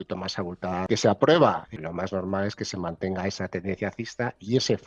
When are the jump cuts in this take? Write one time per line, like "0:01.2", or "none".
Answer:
0:00.8
0:01.7